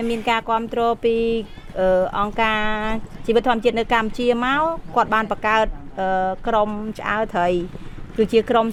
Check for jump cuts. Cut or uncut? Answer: uncut